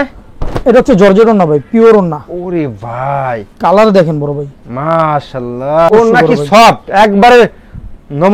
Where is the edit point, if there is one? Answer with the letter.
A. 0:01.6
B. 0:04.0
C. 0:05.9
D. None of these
C